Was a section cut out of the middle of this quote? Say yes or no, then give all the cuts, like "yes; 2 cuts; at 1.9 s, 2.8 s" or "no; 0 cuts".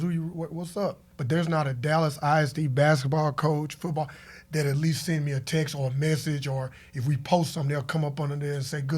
yes; 1 cut; at 1.1 s